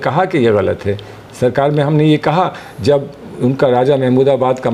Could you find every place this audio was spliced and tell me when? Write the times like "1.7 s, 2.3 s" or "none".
none